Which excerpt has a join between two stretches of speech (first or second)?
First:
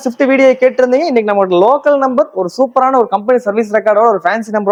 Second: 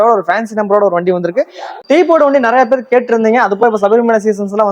second